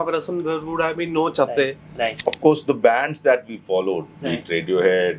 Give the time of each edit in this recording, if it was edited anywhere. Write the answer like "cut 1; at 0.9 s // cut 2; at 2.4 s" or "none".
cut 1; at 2.2 s